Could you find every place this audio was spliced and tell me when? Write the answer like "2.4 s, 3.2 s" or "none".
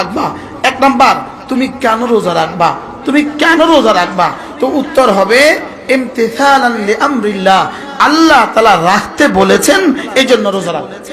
none